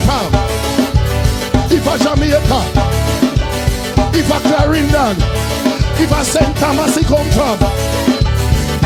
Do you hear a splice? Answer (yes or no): no